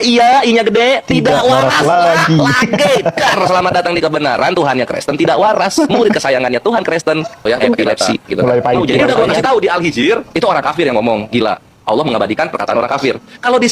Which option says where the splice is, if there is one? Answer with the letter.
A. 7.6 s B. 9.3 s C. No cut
B